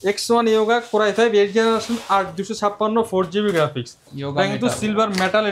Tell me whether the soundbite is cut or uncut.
uncut